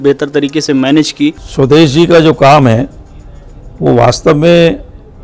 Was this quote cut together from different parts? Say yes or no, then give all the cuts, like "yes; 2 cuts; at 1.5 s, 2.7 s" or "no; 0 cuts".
yes; 1 cut; at 1.4 s